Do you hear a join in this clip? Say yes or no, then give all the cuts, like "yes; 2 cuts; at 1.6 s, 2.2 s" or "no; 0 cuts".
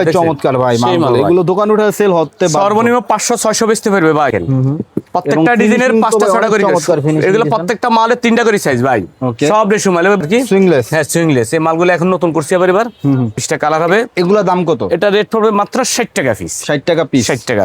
yes; 3 cuts; at 4.3 s, 10.2 s, 13.5 s